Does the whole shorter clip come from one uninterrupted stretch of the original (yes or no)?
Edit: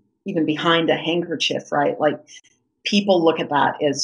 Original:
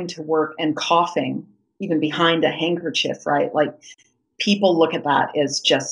yes